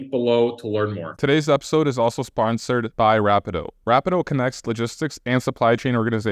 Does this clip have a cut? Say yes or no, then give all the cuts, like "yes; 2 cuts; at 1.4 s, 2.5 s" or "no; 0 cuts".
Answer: yes; 1 cut; at 1.1 s